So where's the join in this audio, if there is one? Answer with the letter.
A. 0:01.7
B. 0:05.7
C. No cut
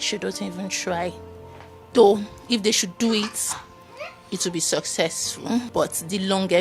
B